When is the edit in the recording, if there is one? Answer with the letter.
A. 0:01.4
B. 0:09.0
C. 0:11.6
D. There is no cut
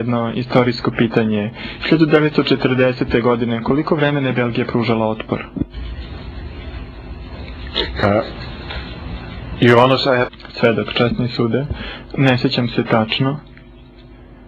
B